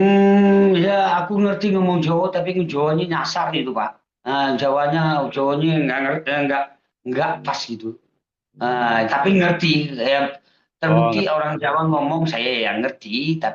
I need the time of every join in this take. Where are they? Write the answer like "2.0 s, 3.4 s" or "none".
none